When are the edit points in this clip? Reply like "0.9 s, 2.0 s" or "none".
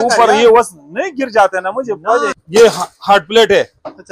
2.4 s